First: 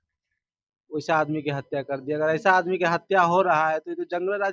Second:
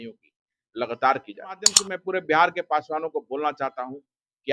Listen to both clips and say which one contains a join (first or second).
second